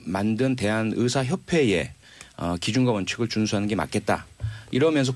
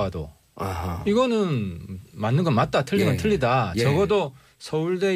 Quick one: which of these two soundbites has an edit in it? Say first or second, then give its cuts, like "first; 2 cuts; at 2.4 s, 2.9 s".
first; 1 cut; at 1.2 s